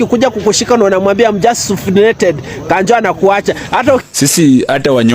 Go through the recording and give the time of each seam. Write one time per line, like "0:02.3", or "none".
0:04.0